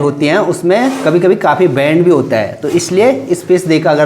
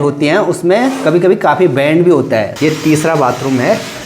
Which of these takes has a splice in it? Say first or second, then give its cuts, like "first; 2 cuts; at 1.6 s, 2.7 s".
second; 1 cut; at 2.5 s